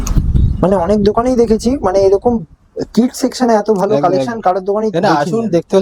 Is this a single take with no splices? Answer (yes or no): yes